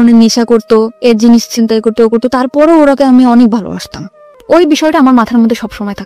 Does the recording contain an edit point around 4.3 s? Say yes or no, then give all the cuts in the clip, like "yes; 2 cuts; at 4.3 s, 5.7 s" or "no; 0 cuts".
yes; 1 cut; at 4.3 s